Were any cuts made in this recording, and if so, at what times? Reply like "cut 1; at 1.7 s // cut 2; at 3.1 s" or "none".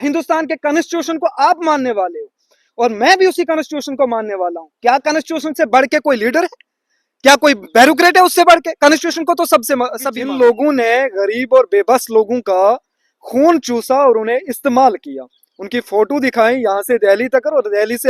cut 1; at 10.2 s